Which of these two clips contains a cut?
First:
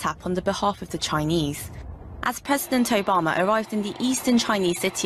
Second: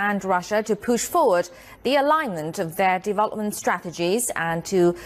second; 1 cut; at 2.2 s

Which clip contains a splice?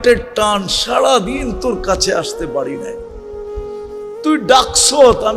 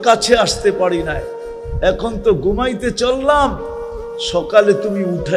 first; 2 cuts; at 2.7 s, 4.2 s

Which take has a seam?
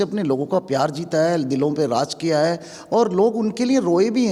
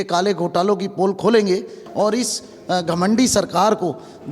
second; 1 cut; at 1.8 s

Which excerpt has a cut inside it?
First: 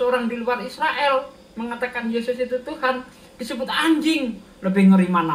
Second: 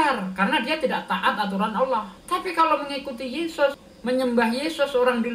second; 2 cuts; at 2.1 s, 3.9 s

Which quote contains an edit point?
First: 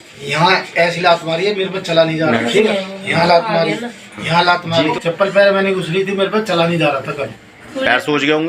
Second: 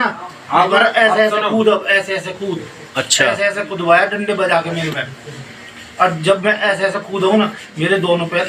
first; 1 cut; at 2.4 s

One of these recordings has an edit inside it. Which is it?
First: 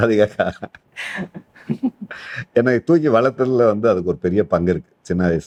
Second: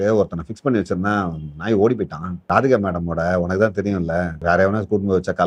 second; 2 cuts; at 2.4 s, 4.3 s

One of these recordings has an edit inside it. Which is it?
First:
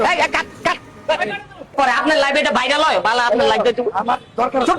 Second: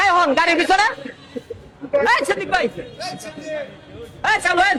first; 1 cut; at 1.8 s

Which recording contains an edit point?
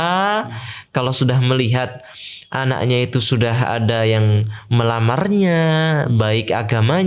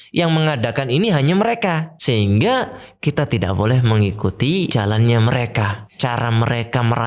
second; 3 cuts; at 1.9 s, 4.7 s, 5.8 s

